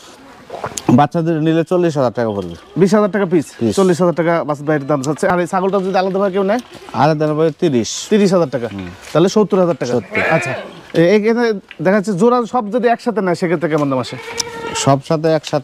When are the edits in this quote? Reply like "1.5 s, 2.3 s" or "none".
none